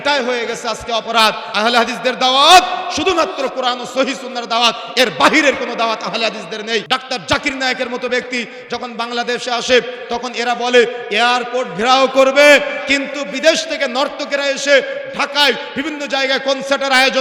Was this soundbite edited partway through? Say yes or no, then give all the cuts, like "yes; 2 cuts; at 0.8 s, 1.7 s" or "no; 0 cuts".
yes; 2 cuts; at 1.5 s, 6.8 s